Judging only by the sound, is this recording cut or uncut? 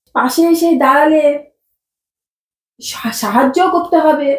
uncut